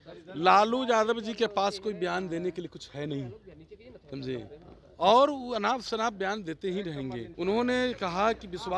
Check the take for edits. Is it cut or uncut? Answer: cut